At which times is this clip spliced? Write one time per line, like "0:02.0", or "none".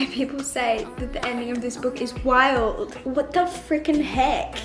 none